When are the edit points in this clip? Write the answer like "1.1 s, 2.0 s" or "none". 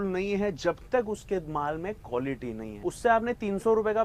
2.7 s